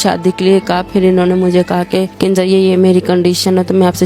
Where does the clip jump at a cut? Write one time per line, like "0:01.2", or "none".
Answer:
none